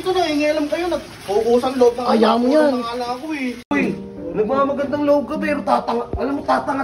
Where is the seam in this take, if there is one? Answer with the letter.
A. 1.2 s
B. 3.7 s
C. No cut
B